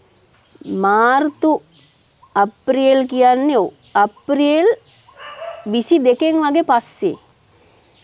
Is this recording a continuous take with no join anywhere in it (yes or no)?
yes